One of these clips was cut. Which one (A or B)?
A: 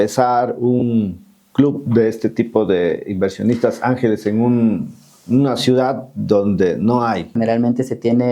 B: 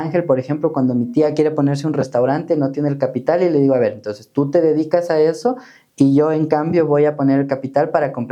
A